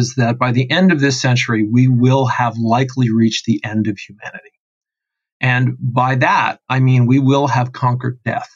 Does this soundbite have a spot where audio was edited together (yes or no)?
no